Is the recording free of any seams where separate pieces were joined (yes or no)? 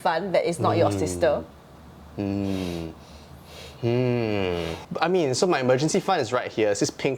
no